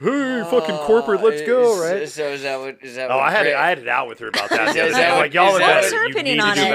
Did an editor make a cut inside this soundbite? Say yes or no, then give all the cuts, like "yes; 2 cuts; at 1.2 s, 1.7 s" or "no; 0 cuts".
no; 0 cuts